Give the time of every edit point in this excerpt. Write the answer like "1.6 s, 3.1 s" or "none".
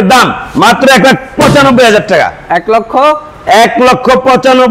none